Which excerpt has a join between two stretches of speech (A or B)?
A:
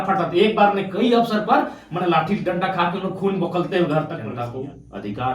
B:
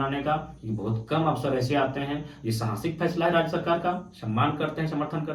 A